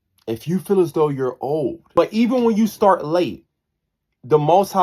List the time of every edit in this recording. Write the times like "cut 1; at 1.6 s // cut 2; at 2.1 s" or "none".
cut 1; at 1.8 s